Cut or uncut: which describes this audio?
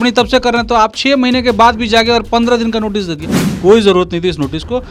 uncut